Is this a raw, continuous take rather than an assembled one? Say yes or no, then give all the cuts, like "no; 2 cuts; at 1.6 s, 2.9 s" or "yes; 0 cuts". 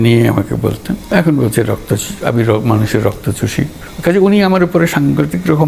no; 2 cuts; at 0.9 s, 3.8 s